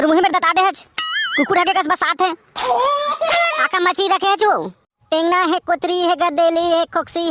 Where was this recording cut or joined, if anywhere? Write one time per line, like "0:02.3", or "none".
0:03.6